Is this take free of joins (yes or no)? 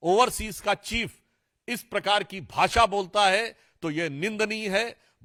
yes